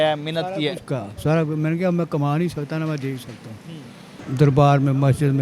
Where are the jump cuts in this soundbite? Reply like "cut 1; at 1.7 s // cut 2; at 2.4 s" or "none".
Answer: cut 1; at 4.1 s